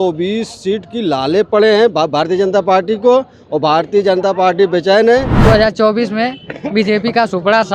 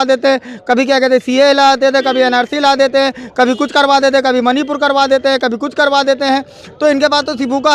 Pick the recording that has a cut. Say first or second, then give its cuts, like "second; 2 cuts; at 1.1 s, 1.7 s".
first; 1 cut; at 5.3 s